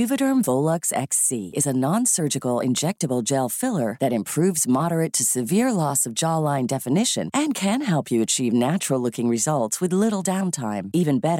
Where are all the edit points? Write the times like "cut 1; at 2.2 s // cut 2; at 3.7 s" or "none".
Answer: none

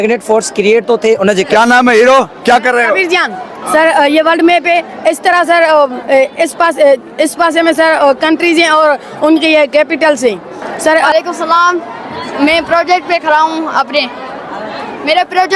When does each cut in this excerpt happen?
cut 1; at 1.5 s // cut 2; at 3.5 s // cut 3; at 11.1 s

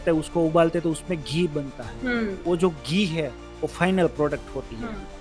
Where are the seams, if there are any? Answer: cut 1; at 2.4 s

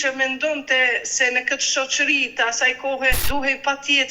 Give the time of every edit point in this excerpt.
cut 1; at 3.2 s

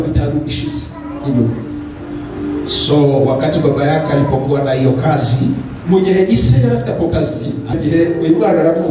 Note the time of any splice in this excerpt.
cut 1; at 7.7 s

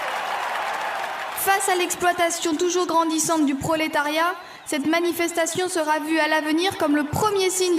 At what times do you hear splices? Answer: cut 1; at 1.2 s

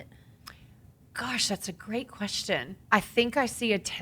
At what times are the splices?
cut 1; at 2.7 s

